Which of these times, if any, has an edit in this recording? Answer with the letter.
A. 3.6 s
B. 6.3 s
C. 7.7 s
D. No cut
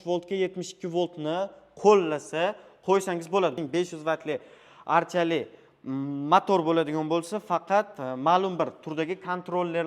A